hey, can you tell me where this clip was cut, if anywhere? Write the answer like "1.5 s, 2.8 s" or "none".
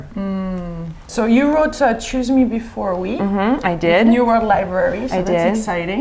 none